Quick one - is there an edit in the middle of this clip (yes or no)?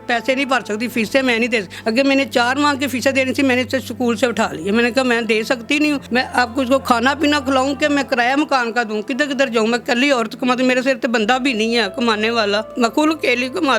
yes